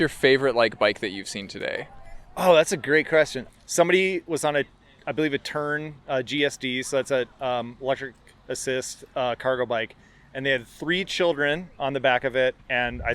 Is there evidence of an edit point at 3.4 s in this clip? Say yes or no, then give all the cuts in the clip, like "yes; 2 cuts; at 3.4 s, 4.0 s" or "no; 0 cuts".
yes; 1 cut; at 3.4 s